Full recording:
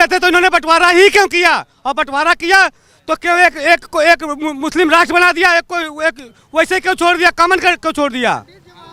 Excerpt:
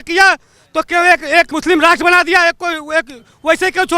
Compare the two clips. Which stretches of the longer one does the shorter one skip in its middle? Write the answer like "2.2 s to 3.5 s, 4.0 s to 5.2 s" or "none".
3.9 s to 4.6 s